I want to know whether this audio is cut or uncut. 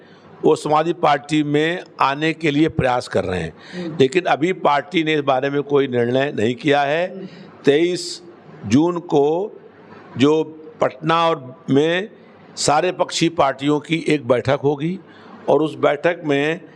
uncut